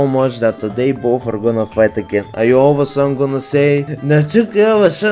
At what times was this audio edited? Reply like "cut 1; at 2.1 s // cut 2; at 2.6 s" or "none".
cut 1; at 2.3 s // cut 2; at 3.9 s